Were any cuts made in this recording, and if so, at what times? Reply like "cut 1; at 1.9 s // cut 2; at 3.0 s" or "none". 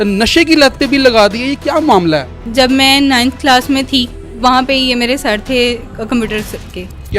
cut 1; at 2.5 s // cut 2; at 4.3 s